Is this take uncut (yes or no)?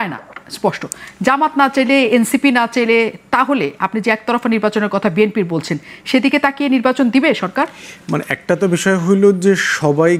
yes